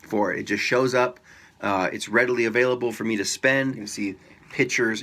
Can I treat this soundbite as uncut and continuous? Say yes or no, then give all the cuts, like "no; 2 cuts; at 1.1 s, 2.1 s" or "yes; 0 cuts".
no; 1 cut; at 3.9 s